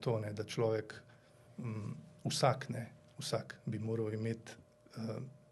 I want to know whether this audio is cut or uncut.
uncut